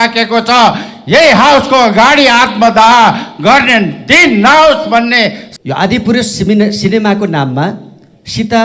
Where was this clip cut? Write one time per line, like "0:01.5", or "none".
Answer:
0:05.4